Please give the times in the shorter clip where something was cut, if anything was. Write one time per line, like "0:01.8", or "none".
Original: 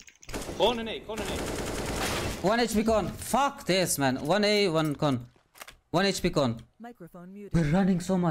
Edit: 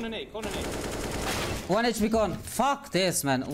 none